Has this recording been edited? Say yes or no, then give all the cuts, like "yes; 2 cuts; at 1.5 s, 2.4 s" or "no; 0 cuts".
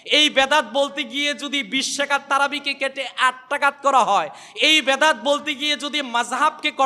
no; 0 cuts